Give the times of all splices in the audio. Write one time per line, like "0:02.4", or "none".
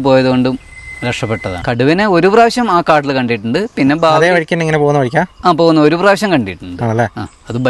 0:01.5